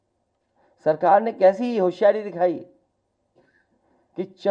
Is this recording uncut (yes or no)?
yes